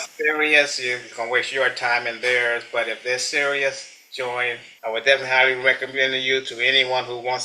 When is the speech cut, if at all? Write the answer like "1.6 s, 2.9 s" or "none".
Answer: 4.7 s